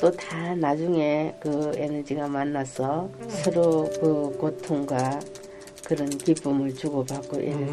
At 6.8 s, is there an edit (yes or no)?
no